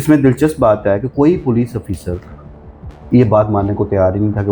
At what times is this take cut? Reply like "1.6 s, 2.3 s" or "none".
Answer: none